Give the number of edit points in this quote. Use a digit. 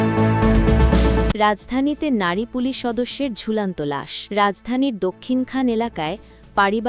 2